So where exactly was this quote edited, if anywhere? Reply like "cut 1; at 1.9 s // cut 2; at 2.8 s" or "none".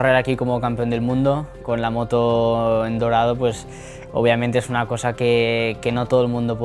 none